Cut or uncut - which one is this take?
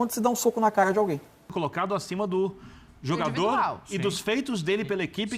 cut